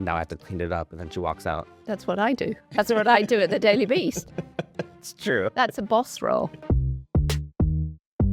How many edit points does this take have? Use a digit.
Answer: 1